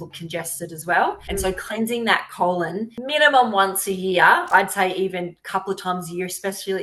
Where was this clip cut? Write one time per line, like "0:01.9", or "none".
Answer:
0:01.2
0:02.9
0:04.5